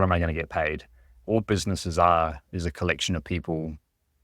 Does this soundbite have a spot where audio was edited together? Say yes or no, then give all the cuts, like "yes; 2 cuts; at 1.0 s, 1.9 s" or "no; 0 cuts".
yes; 1 cut; at 1.1 s